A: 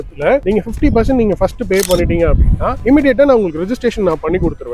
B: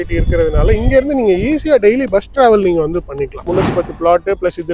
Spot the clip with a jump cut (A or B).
B